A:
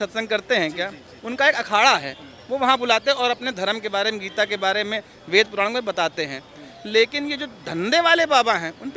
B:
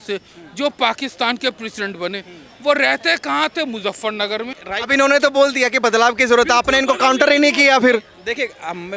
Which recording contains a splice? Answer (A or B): B